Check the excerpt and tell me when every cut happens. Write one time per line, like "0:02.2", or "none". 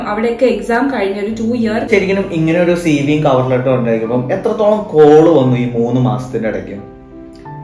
0:01.9